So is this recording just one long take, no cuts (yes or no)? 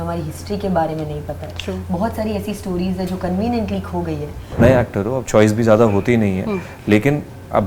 no